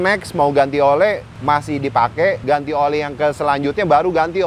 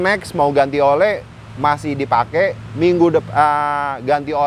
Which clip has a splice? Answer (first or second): first